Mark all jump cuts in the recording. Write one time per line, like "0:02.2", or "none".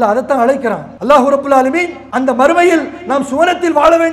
0:00.9
0:02.0